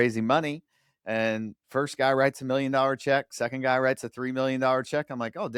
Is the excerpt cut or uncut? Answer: uncut